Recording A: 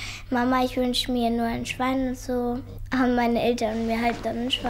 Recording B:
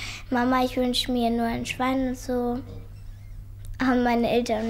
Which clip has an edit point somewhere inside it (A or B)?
A